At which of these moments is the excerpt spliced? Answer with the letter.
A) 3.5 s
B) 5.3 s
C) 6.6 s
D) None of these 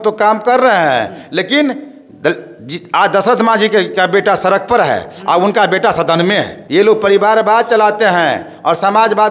C